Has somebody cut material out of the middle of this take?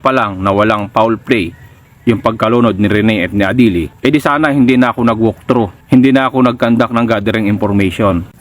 yes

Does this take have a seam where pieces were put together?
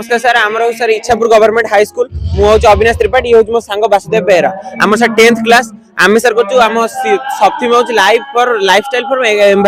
no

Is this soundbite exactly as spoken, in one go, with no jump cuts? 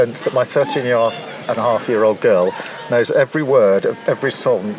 yes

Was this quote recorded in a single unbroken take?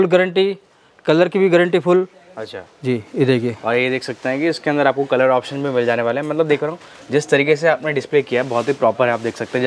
yes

